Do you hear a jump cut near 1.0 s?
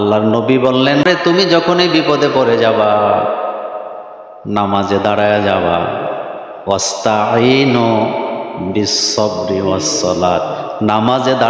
yes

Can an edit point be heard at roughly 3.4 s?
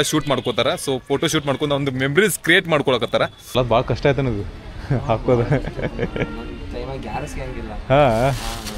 yes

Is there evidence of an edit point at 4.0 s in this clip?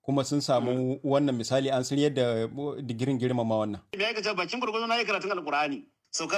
yes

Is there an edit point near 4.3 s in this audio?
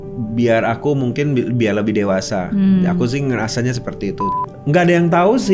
yes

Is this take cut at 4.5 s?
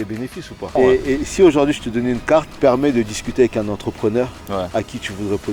no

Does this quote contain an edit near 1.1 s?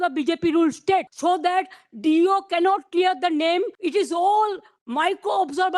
yes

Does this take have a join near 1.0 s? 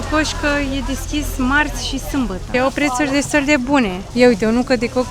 no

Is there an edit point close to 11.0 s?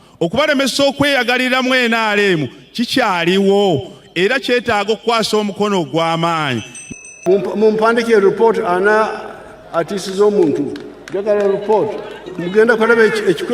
no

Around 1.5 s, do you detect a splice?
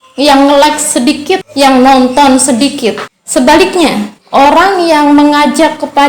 yes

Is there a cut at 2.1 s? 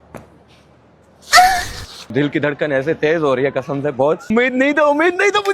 yes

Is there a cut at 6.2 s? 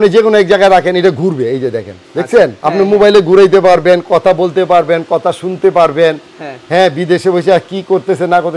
no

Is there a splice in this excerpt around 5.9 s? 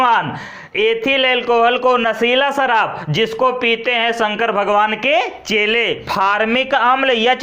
yes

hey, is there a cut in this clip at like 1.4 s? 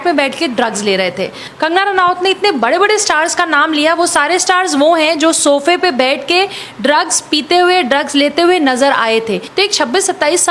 yes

